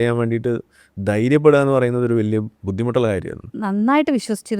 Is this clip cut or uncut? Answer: cut